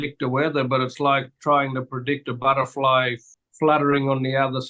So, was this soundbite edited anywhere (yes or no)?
yes